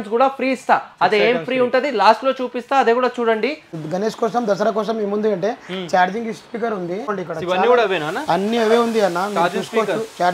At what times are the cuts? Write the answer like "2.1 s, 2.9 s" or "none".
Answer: 3.7 s, 7.1 s